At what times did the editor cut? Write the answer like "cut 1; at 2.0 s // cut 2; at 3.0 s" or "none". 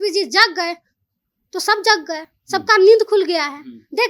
none